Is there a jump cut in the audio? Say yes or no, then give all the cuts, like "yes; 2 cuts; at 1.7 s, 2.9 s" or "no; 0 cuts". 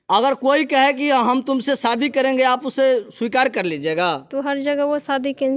no; 0 cuts